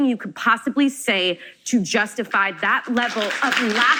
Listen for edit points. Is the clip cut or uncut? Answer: uncut